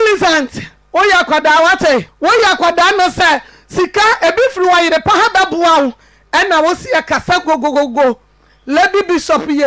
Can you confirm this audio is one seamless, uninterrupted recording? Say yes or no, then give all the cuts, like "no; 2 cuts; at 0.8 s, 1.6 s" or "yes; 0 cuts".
no; 1 cut; at 2.1 s